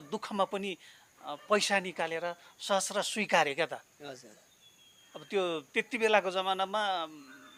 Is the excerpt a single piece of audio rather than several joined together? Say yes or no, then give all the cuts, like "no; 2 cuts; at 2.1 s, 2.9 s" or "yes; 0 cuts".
yes; 0 cuts